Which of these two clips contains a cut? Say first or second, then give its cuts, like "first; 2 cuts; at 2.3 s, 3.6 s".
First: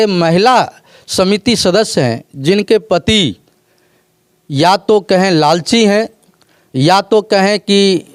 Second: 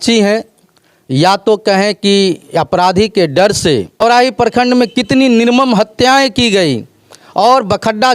second; 1 cut; at 3.9 s